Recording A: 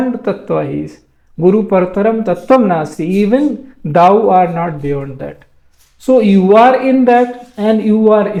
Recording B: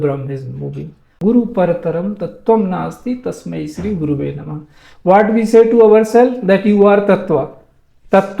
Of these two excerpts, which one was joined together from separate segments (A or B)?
B